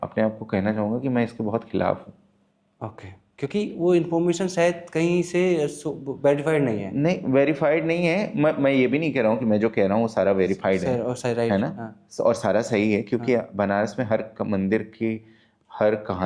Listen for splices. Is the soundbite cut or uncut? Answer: uncut